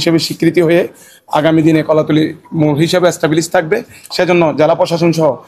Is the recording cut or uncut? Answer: uncut